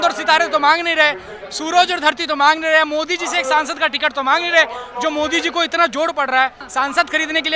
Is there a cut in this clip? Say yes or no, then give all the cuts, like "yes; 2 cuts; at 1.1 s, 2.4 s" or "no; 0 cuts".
yes; 1 cut; at 6.6 s